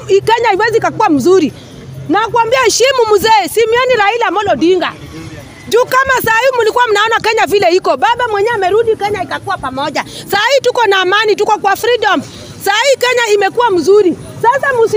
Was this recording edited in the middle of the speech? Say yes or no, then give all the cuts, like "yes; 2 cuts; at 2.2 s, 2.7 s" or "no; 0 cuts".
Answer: no; 0 cuts